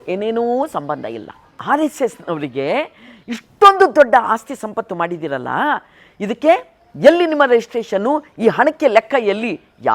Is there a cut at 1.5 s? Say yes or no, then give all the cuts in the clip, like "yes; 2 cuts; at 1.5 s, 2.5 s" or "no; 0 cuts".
yes; 1 cut; at 1.5 s